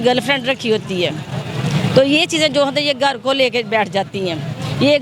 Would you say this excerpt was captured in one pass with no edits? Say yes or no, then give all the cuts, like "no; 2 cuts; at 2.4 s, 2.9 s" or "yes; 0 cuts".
yes; 0 cuts